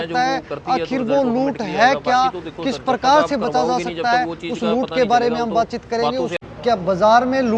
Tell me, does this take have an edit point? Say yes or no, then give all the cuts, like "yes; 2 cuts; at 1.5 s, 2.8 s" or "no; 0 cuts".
yes; 1 cut; at 6.4 s